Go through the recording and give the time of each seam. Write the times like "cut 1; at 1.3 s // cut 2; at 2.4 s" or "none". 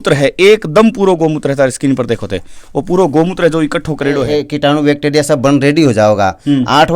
cut 1; at 4.2 s